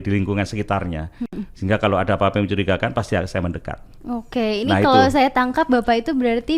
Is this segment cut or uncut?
uncut